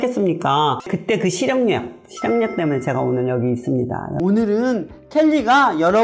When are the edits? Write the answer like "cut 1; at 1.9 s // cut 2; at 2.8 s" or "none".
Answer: cut 1; at 0.9 s // cut 2; at 4.1 s